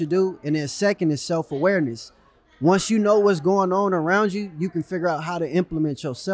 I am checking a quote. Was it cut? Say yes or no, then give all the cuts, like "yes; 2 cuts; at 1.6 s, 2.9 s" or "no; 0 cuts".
no; 0 cuts